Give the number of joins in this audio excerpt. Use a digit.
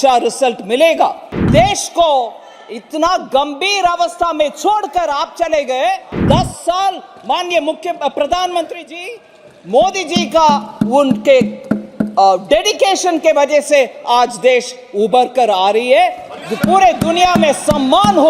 2